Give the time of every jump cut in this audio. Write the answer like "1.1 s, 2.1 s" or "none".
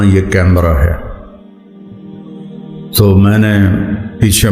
1.1 s, 2.8 s